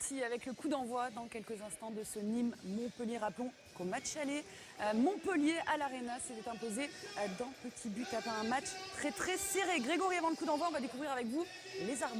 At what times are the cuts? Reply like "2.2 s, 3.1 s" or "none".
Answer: none